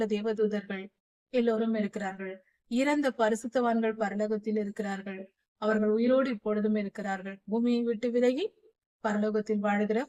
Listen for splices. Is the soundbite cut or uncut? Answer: uncut